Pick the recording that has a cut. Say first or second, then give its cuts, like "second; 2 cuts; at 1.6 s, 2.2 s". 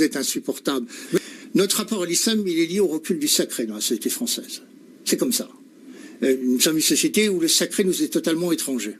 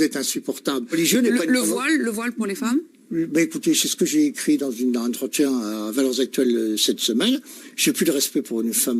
second; 1 cut; at 0.9 s